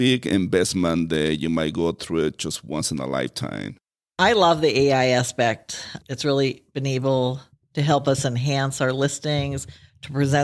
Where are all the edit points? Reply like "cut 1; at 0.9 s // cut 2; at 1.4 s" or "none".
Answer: cut 1; at 4.2 s